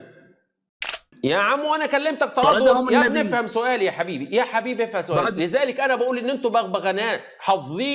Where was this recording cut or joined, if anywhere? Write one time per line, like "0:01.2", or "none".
0:01.1